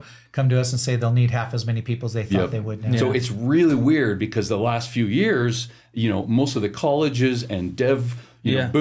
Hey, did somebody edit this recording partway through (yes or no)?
no